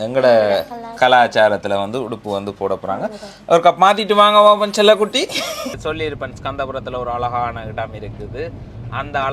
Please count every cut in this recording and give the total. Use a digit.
1